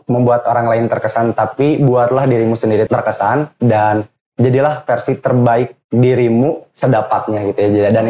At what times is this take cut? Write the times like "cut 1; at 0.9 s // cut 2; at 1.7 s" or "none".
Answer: cut 1; at 2.9 s

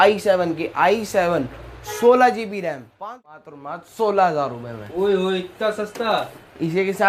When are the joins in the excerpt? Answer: cut 1; at 2.9 s

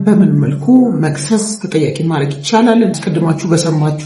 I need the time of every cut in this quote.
cut 1; at 3.0 s

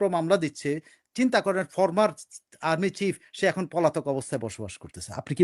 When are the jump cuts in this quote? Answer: none

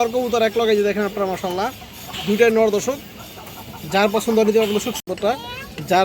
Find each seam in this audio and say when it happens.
cut 1; at 5.0 s

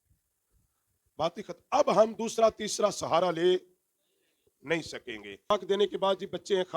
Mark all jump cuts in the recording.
cut 1; at 5.5 s

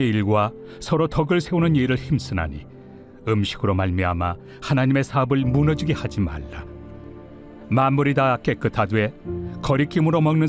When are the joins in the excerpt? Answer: cut 1; at 2.8 s

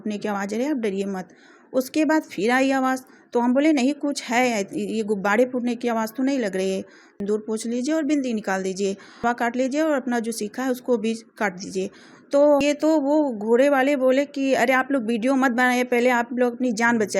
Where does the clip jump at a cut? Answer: cut 1; at 7.1 s // cut 2; at 9.2 s // cut 3; at 12.6 s

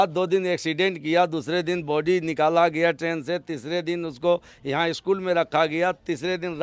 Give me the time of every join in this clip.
none

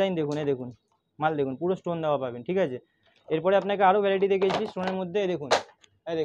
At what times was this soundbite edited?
none

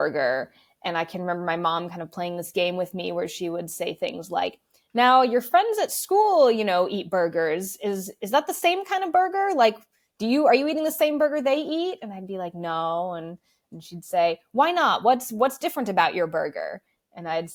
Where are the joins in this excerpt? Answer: none

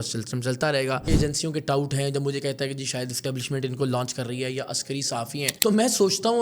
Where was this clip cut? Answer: cut 1; at 1.1 s

